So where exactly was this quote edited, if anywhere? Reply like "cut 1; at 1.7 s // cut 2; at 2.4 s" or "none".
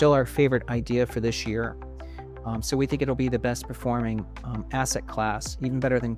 none